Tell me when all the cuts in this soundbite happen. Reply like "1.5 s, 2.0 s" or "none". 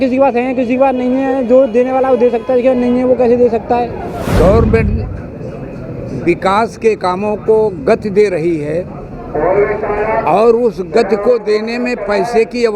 4.2 s